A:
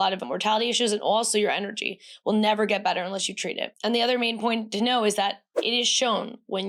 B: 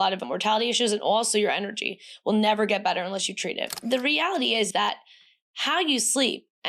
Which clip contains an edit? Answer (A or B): B